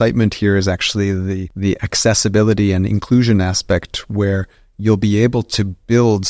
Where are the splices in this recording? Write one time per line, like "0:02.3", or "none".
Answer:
0:01.5

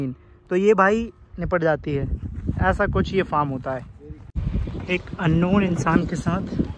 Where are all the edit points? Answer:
0:04.2

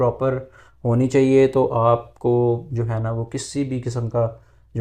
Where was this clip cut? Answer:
none

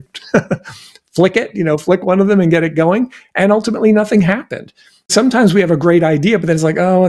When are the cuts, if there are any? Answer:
0:05.1

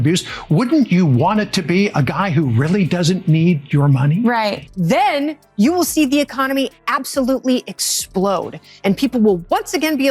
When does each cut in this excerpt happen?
0:04.6

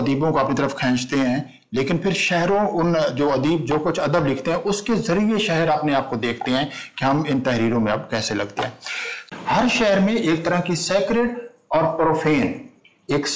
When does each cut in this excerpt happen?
0:09.2

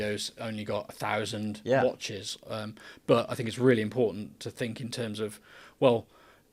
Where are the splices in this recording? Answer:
none

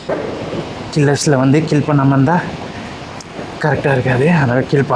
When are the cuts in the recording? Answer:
none

